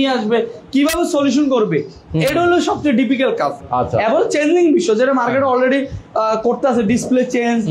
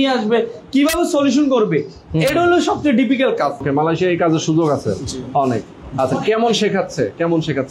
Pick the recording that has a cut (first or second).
second